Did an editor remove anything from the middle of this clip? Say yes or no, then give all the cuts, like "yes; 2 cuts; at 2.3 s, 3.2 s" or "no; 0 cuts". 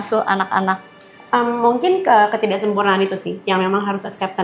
no; 0 cuts